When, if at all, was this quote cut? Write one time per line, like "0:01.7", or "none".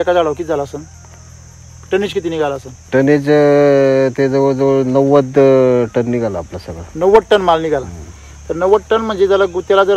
none